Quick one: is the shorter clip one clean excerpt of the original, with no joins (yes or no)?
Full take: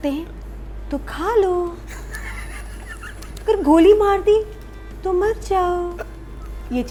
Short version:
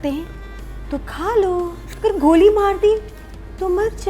no